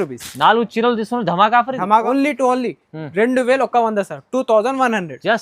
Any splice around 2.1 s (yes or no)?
yes